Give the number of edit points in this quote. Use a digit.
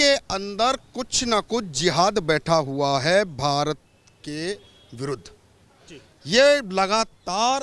0